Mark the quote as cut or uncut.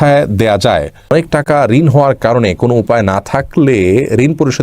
cut